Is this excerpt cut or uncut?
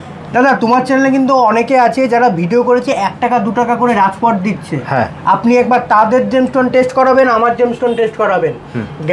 uncut